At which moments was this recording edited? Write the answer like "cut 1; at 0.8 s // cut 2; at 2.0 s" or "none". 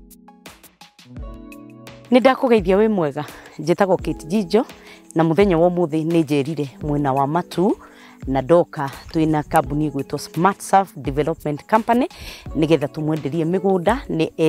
cut 1; at 2.0 s